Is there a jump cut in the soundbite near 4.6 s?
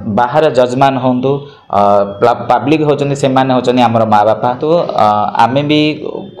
yes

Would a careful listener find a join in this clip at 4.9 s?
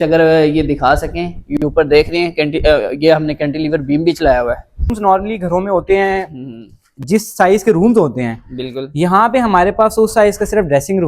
yes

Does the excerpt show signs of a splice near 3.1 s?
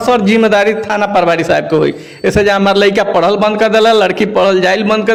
no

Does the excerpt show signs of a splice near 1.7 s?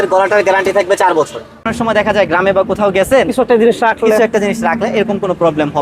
yes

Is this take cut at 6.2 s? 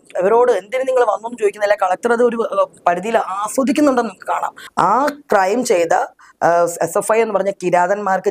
no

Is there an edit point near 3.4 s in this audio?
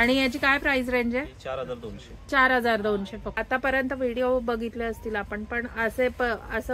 yes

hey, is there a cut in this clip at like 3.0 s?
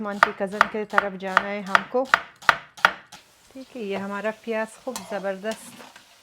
yes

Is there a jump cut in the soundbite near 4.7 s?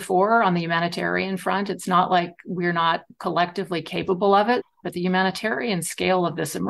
yes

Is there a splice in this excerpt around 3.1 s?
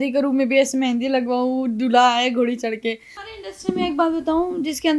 yes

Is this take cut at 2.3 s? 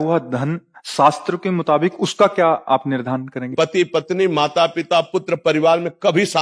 no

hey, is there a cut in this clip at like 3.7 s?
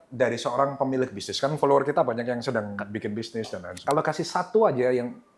yes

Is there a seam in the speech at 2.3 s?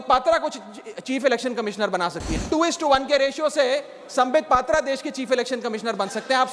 yes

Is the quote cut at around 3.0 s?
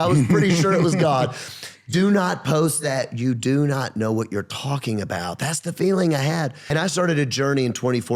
no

